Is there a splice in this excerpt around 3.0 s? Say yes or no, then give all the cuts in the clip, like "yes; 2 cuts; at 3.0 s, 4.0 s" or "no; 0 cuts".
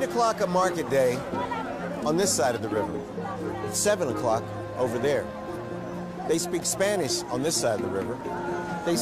no; 1 cut; at 6.6 s